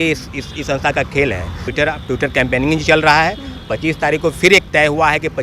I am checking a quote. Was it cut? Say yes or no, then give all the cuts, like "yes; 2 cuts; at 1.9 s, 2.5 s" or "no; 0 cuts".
yes; 1 cut; at 1.6 s